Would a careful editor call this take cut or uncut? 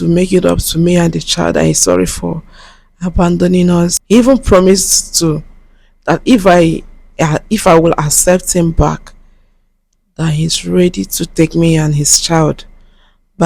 cut